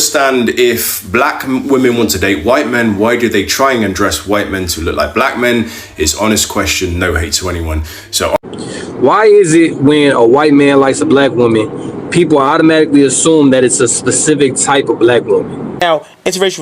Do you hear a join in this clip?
yes; 2 cuts; at 8.4 s, 15.8 s

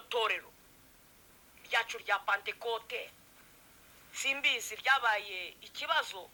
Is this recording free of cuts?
yes; 0 cuts

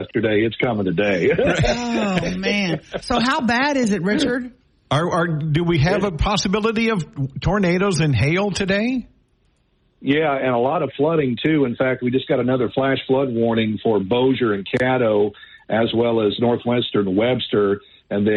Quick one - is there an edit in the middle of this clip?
no; 0 cuts

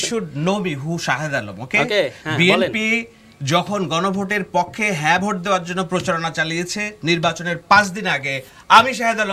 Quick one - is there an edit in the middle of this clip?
no; 0 cuts

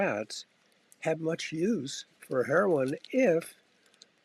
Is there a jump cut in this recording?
no; 0 cuts

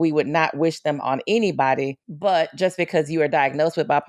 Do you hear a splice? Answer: yes; 1 cut; at 2.0 s

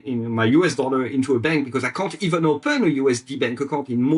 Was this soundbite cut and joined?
no; 0 cuts

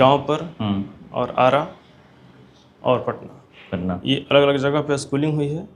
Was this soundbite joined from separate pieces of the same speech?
no; 0 cuts

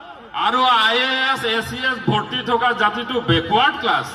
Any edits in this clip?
no; 0 cuts

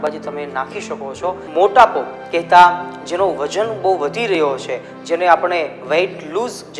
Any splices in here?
yes; 1 cut; at 1.4 s

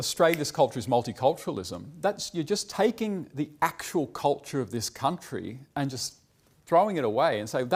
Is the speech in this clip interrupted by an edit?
no; 0 cuts

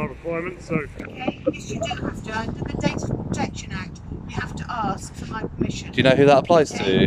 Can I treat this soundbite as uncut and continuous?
no; 1 cut; at 1.0 s

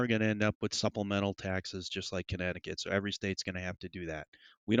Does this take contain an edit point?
no; 0 cuts

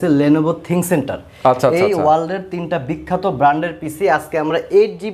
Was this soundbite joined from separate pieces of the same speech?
no; 0 cuts

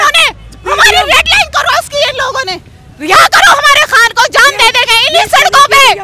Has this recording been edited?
no; 0 cuts

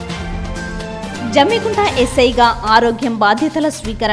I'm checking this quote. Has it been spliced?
no; 0 cuts

